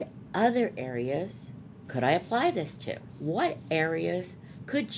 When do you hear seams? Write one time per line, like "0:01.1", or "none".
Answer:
0:03.1